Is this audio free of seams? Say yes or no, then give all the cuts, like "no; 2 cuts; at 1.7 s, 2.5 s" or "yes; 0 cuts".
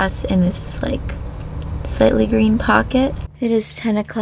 no; 1 cut; at 3.3 s